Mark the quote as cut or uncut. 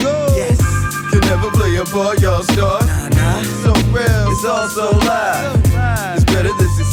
uncut